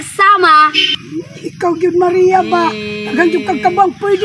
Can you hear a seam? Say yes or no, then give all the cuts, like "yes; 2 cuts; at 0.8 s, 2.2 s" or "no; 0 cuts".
yes; 1 cut; at 1.0 s